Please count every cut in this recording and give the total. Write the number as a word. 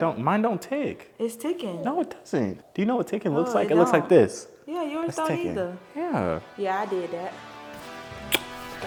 zero